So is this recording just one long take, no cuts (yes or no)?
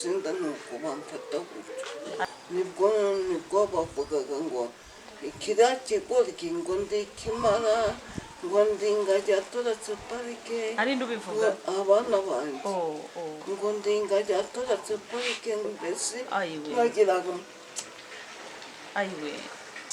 no